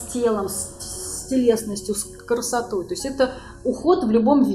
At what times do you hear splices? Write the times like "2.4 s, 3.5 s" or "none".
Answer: none